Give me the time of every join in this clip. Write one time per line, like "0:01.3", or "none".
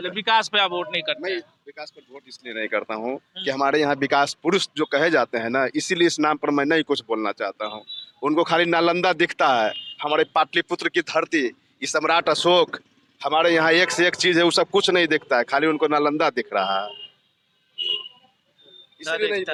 none